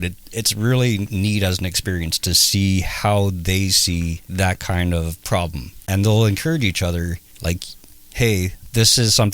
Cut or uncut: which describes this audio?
cut